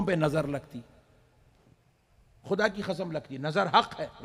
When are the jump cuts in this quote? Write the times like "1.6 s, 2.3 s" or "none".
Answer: none